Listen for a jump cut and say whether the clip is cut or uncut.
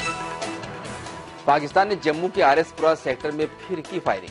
uncut